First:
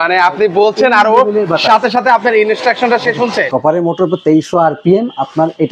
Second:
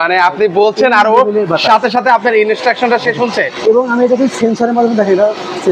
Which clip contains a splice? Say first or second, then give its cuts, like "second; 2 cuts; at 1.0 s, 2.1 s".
first; 1 cut; at 3.5 s